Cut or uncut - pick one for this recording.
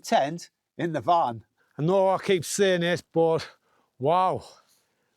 cut